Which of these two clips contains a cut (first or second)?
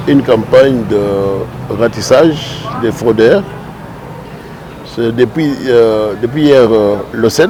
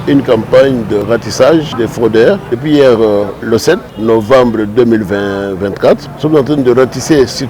second